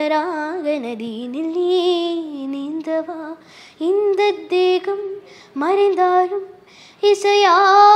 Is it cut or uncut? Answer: uncut